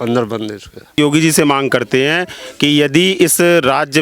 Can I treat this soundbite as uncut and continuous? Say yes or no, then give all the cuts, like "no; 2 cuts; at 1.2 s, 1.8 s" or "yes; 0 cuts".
no; 1 cut; at 1.0 s